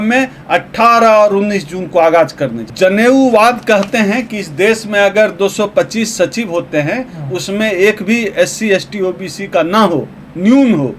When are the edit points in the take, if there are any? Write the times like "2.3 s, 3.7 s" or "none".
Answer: 2.6 s